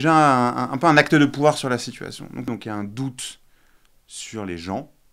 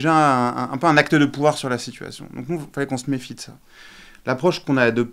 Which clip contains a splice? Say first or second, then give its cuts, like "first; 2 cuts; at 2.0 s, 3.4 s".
first; 1 cut; at 2.5 s